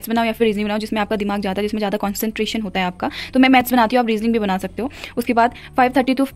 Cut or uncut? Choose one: uncut